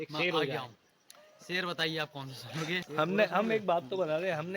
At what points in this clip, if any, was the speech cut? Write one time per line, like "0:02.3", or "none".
0:02.9